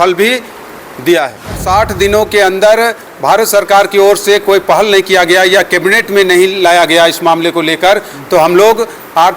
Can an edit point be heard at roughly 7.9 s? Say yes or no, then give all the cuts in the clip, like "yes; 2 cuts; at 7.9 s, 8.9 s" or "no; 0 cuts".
no; 1 cut; at 1.6 s